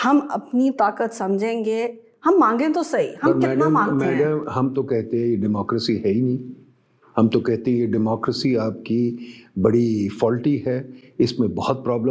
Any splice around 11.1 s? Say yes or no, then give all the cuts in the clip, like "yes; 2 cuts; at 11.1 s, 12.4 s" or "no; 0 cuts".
no; 0 cuts